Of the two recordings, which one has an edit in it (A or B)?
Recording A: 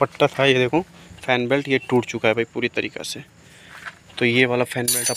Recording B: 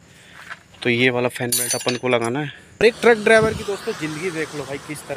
B